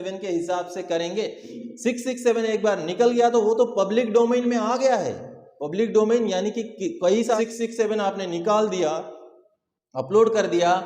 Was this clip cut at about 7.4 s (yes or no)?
yes